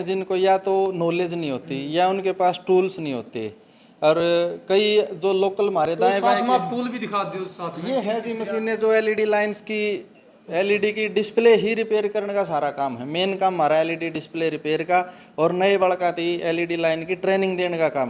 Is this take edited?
no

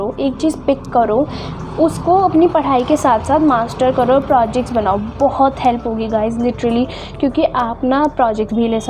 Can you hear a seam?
no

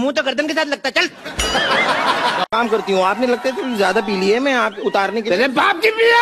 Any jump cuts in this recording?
yes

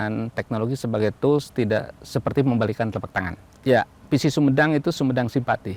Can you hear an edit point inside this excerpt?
yes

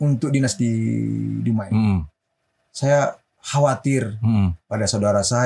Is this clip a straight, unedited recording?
no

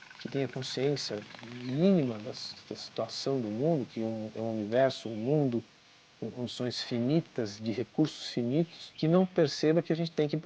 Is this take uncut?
no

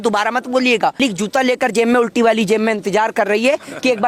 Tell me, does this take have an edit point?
yes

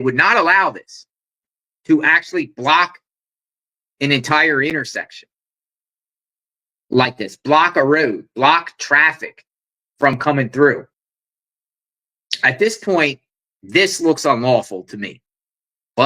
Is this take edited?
no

